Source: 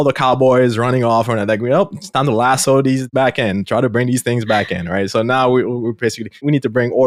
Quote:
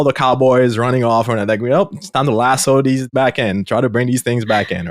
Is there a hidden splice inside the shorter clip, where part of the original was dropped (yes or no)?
no